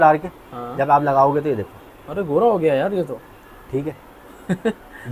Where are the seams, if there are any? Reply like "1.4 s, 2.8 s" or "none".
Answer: none